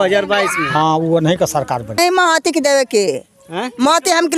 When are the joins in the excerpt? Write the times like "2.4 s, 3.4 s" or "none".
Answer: 2.0 s